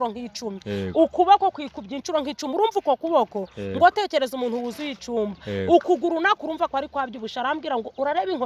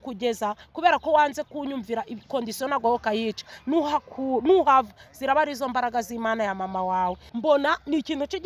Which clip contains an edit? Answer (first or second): second